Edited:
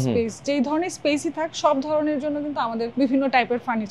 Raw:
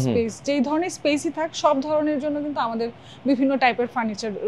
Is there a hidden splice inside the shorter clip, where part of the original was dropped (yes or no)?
yes